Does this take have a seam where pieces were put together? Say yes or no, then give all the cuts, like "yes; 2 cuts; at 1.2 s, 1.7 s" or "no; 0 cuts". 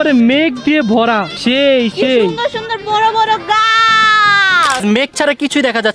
yes; 2 cuts; at 1.3 s, 4.8 s